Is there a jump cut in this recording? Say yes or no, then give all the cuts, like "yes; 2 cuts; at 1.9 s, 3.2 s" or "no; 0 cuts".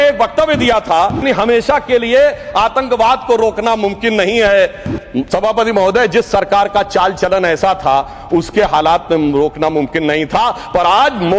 yes; 1 cut; at 1.2 s